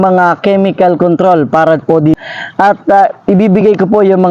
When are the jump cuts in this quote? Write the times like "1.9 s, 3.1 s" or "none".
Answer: 2.2 s